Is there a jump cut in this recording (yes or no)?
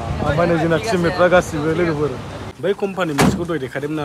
yes